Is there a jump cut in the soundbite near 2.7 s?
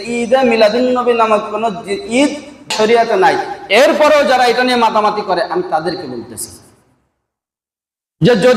yes; 1 cut; at 2.7 s

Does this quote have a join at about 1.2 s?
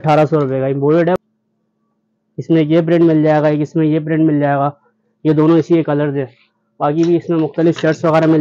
yes; 1 cut; at 1.2 s

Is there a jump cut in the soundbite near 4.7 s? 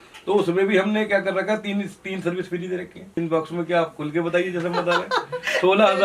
no; 1 cut; at 3.2 s

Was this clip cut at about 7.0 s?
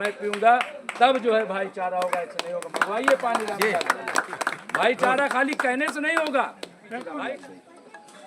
yes; 1 cut; at 7.0 s

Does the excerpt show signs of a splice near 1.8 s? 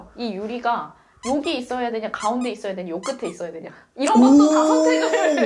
no; 0 cuts

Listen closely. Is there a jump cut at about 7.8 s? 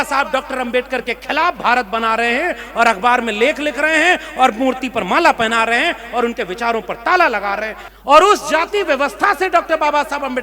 yes; 1 cut; at 7.8 s

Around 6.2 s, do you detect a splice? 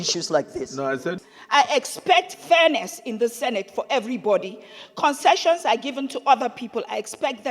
no; 1 cut; at 1.2 s

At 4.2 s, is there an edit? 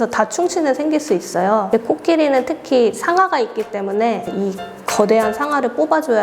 yes; 1 cut; at 4.2 s

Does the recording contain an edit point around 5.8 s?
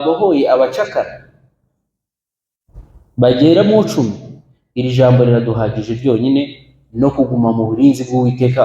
no; 0 cuts

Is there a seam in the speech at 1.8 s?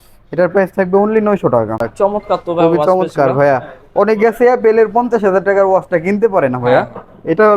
yes; 1 cut; at 1.8 s

